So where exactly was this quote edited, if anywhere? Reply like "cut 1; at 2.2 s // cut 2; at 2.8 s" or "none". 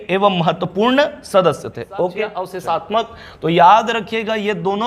cut 1; at 2.5 s